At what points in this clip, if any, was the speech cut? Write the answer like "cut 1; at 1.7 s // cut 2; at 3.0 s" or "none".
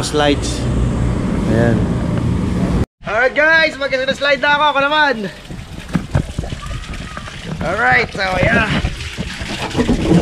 cut 1; at 2.8 s